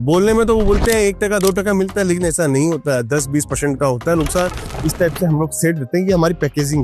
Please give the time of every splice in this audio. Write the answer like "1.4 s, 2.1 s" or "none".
4.7 s